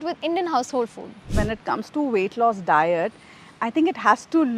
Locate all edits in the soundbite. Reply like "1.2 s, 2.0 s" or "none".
1.3 s